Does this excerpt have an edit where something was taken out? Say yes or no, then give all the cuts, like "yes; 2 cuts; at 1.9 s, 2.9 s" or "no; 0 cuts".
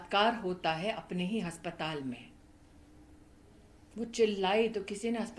no; 0 cuts